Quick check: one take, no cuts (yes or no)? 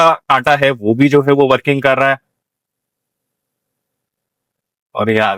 yes